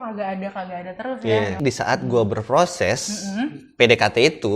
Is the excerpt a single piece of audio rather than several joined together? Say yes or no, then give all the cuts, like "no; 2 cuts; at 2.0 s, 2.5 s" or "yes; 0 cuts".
no; 1 cut; at 1.6 s